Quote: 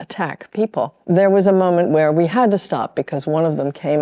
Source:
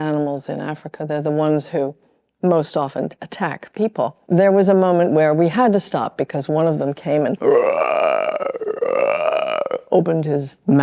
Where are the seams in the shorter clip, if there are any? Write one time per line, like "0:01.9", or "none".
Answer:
none